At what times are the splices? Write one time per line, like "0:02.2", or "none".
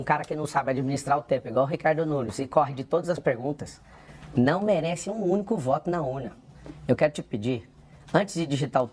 none